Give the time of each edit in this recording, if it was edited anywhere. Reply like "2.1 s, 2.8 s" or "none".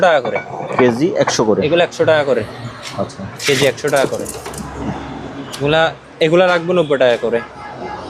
none